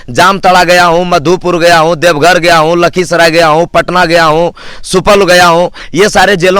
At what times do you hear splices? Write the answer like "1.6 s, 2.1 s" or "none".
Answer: none

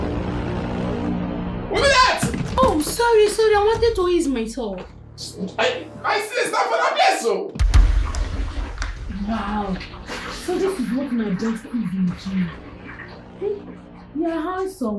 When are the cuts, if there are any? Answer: 1.7 s

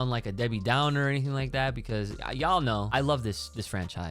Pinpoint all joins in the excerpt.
2.9 s

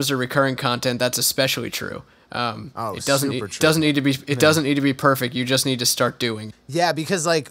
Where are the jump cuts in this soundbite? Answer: 6.5 s

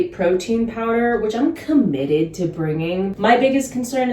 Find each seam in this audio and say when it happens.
3.1 s

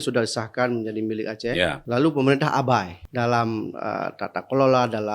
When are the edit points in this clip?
1.8 s, 3.0 s

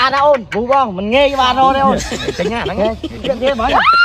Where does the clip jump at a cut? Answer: none

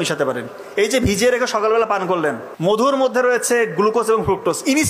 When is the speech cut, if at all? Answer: 2.8 s

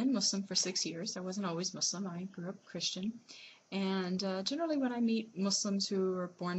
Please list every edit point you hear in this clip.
5.7 s

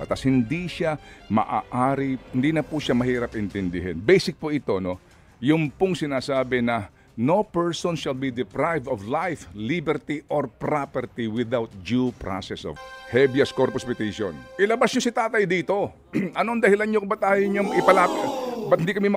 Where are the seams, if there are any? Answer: 12.8 s

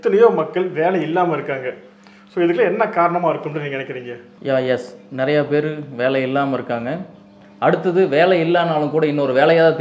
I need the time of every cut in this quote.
none

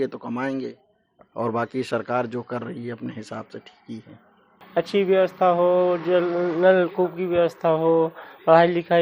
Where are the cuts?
4.6 s

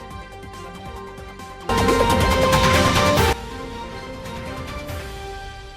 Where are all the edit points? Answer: 1.1 s

